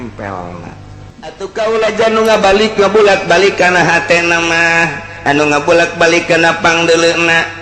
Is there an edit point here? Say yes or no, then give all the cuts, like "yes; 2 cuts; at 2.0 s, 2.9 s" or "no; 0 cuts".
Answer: yes; 1 cut; at 1.4 s